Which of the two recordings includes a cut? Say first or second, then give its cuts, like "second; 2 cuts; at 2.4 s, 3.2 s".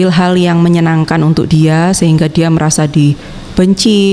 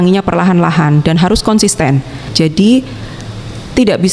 second; 1 cut; at 2.2 s